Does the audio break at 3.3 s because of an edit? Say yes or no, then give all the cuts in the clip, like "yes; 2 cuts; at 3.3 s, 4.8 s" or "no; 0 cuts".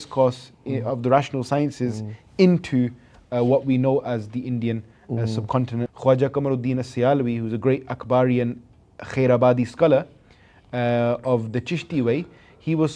no; 1 cut; at 5.9 s